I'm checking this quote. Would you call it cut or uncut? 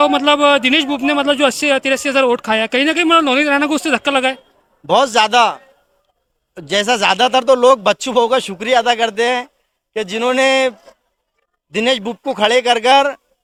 uncut